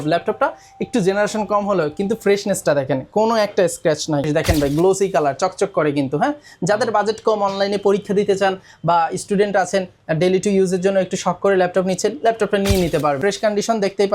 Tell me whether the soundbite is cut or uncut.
cut